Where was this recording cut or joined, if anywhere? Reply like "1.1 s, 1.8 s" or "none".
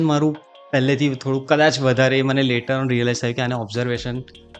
none

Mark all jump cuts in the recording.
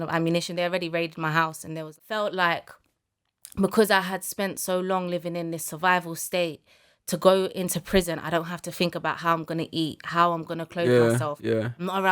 1.9 s

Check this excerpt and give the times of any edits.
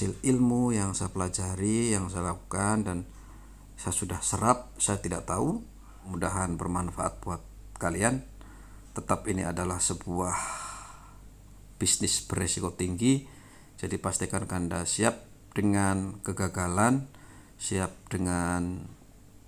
6.1 s

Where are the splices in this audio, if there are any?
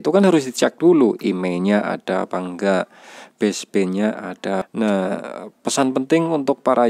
4.7 s

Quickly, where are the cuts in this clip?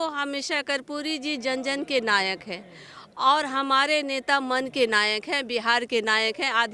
none

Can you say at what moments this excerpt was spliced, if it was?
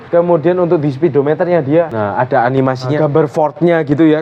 2.9 s

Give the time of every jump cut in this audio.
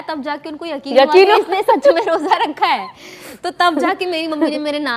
none

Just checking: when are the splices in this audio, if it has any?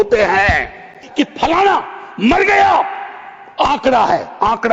1.0 s

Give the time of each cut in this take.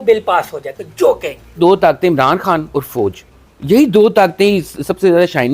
1.6 s

